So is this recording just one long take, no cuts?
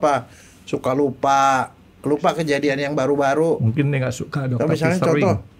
yes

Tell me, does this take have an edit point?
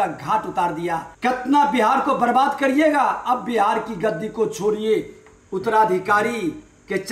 yes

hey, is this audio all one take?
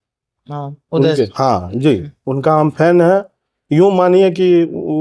yes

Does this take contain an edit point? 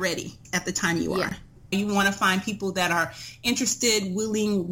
no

